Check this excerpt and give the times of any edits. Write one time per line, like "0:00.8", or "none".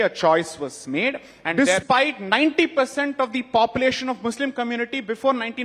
0:01.5